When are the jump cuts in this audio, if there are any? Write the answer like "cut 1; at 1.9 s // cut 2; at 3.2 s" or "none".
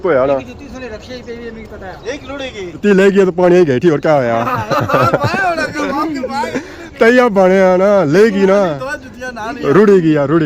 cut 1; at 2.8 s